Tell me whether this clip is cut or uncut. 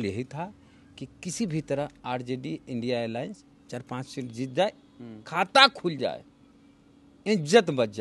uncut